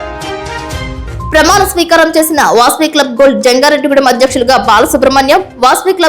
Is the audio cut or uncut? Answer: cut